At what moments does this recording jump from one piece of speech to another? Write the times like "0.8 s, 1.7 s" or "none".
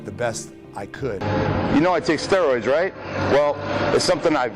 none

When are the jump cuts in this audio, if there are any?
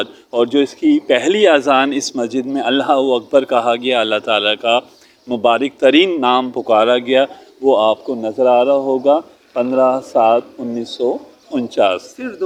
none

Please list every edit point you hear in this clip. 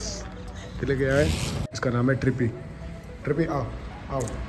1.5 s

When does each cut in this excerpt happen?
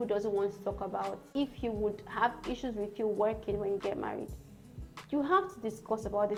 none

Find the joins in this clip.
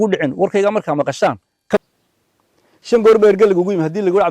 1.8 s

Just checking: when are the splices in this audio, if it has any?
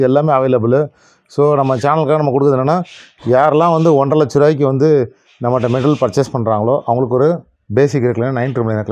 none

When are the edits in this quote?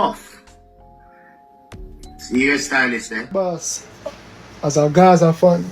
3.3 s

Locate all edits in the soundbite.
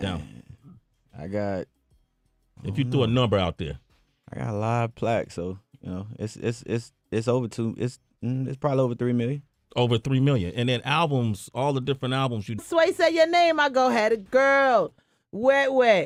none

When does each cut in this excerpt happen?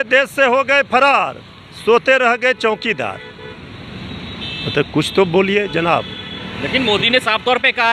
none

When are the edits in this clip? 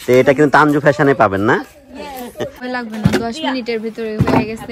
2.6 s

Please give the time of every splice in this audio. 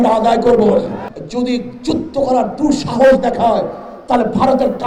1.0 s

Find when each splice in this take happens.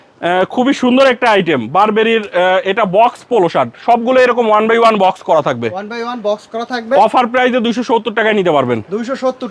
none

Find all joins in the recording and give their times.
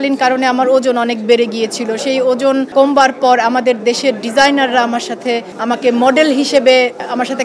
2.7 s, 5.5 s

